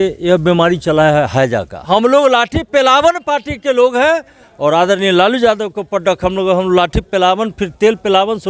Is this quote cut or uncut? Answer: cut